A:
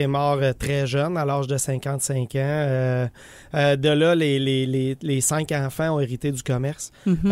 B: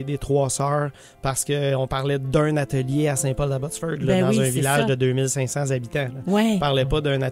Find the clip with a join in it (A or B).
A